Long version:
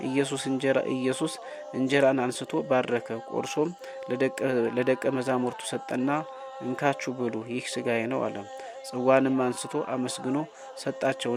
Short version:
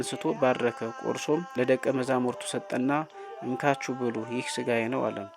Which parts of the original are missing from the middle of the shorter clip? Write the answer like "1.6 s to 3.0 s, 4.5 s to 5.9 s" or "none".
3.8 s to 4.7 s